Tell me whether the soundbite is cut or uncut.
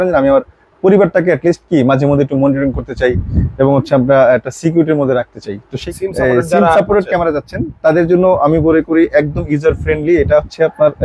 cut